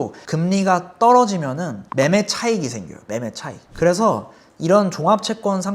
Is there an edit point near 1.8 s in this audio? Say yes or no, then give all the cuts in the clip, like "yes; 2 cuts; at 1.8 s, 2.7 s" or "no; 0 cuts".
yes; 1 cut; at 1.8 s